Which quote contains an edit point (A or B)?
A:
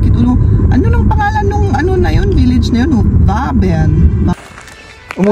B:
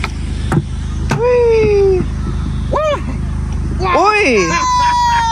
A